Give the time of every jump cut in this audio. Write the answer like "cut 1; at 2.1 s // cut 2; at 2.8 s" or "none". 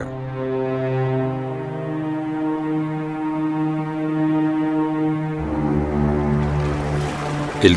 cut 1; at 6.7 s